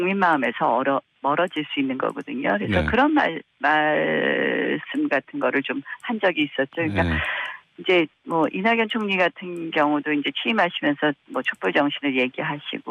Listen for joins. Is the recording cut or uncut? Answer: cut